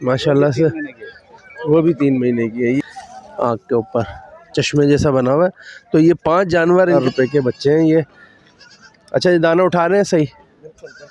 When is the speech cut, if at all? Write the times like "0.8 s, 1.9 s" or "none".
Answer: 2.8 s, 7.0 s

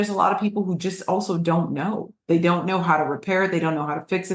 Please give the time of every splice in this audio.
none

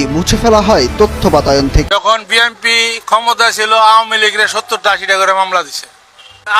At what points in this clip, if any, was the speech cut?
1.9 s

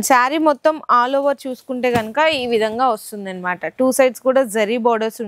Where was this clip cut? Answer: none

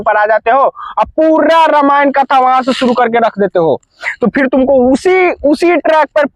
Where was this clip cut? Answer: none

